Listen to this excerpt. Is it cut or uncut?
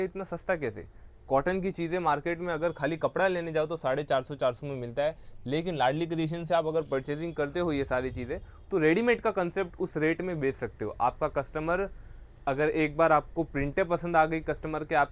uncut